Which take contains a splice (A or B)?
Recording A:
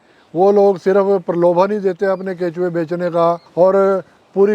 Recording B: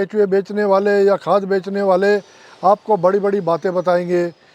A